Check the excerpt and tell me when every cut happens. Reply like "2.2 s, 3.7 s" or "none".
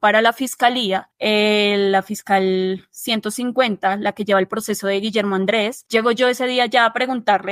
1.1 s, 5.8 s

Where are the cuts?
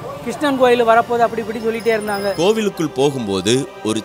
2.4 s

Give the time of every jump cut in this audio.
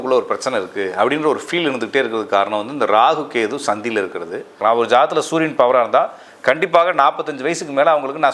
4.6 s

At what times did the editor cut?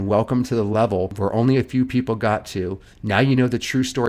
1.1 s

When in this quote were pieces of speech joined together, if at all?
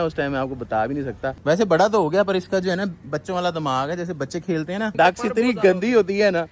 1.4 s, 4.9 s

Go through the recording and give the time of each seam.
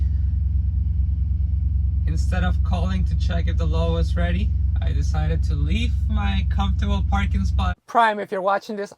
7.7 s

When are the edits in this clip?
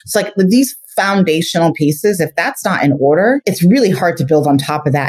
3.4 s

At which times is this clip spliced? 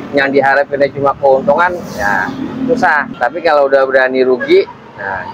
none

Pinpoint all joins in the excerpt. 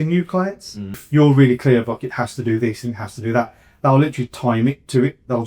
1.0 s

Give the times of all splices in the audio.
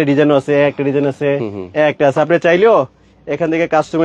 none

